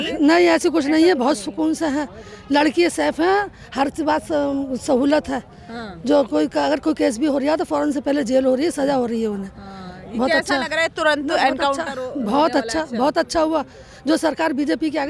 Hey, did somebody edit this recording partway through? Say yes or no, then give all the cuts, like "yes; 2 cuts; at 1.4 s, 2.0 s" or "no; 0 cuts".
no; 0 cuts